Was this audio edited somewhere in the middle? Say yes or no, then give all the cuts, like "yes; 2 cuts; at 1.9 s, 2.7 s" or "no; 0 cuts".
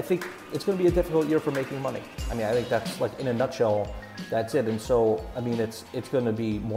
no; 0 cuts